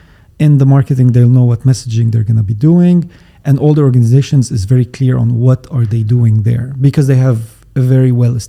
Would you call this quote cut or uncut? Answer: uncut